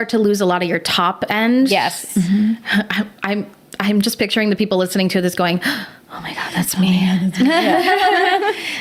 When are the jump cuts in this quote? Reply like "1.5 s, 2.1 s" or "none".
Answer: none

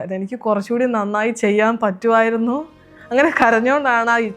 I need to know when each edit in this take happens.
none

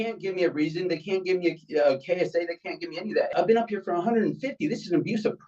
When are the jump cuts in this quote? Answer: 3.3 s

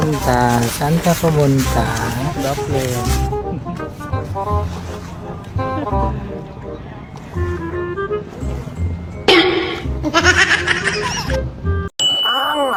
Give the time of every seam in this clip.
none

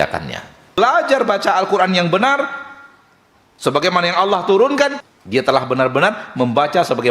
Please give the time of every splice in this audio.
0.8 s, 5.0 s

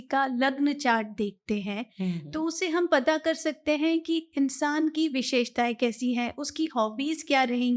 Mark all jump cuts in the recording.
none

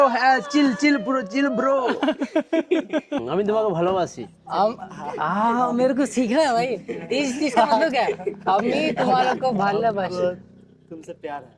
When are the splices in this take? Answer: 3.2 s

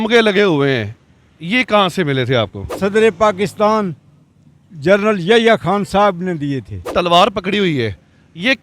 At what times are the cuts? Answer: 2.6 s, 6.8 s

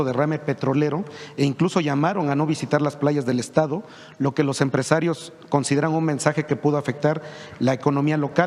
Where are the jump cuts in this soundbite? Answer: none

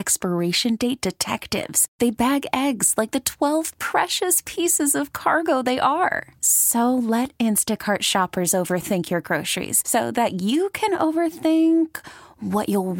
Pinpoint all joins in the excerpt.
none

